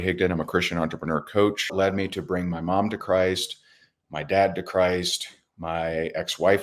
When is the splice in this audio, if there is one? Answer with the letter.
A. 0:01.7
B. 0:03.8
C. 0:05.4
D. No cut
A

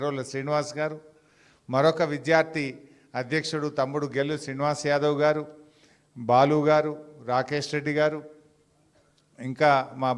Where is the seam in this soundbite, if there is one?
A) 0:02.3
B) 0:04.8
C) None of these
B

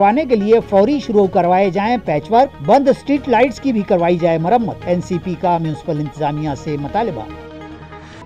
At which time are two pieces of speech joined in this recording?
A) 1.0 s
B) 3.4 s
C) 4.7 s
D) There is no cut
D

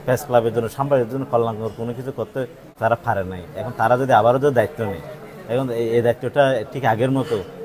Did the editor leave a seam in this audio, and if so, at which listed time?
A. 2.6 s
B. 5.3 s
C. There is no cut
A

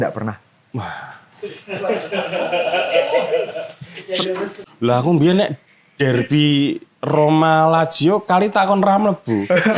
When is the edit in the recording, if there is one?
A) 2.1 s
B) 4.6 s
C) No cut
B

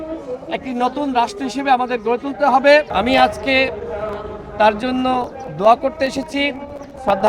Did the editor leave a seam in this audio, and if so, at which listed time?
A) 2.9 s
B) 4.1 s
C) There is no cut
A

